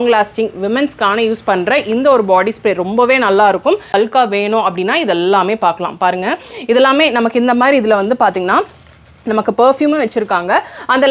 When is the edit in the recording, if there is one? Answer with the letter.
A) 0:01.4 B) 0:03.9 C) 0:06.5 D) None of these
B